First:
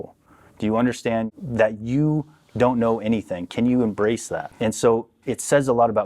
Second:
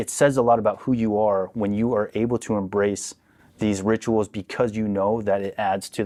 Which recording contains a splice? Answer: first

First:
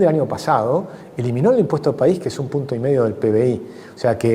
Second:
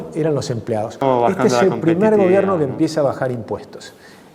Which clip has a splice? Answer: second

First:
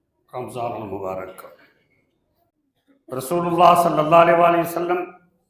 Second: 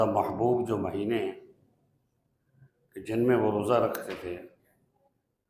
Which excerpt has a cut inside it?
first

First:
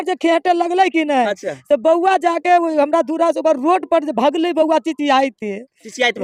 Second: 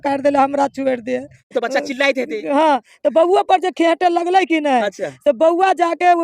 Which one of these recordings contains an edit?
second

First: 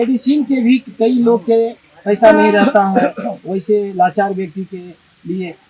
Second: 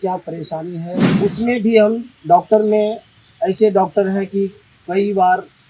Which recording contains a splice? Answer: second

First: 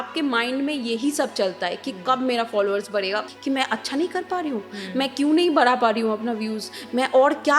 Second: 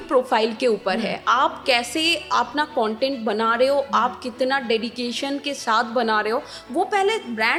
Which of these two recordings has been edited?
first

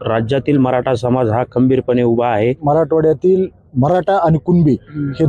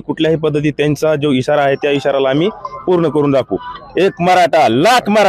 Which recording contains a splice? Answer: first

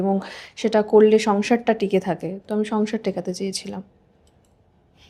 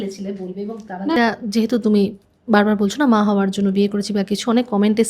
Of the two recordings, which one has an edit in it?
second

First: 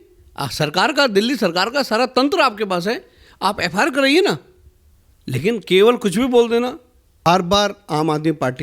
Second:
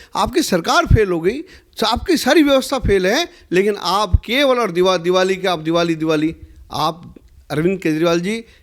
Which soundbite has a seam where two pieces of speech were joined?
first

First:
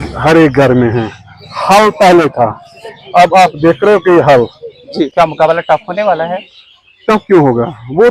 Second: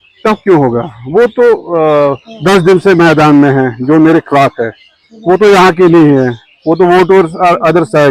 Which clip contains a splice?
first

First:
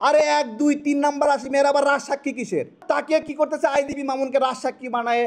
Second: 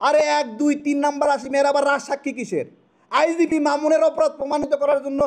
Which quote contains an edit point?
first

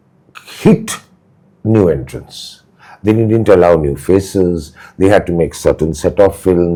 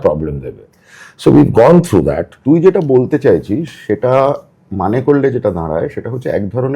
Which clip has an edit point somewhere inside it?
second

